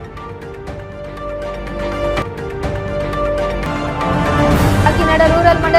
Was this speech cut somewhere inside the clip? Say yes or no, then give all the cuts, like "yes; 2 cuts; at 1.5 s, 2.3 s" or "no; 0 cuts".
yes; 1 cut; at 1.2 s